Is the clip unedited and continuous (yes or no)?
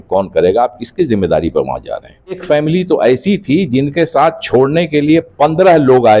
no